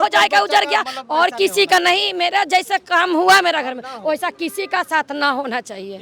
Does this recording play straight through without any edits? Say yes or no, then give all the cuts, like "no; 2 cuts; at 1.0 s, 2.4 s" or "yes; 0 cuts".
yes; 0 cuts